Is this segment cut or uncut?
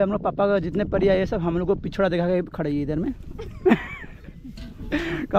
uncut